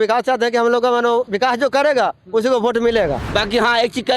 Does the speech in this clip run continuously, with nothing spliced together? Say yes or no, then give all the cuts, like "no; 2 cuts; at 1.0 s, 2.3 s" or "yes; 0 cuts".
no; 2 cuts; at 1.3 s, 2.9 s